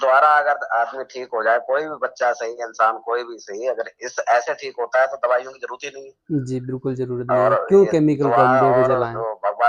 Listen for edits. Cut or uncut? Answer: uncut